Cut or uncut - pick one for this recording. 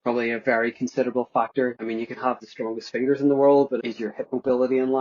cut